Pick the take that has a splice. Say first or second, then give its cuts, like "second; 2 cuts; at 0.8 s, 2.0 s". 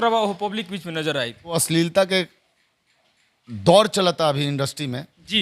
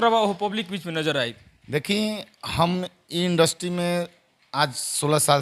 first; 1 cut; at 1.5 s